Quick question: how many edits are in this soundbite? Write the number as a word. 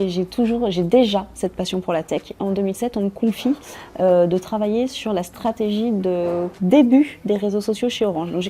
one